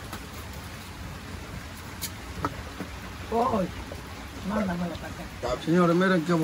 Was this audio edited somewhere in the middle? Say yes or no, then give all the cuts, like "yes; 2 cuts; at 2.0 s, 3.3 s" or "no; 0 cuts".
no; 0 cuts